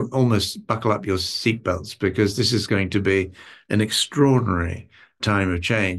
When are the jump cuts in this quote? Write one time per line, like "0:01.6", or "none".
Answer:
none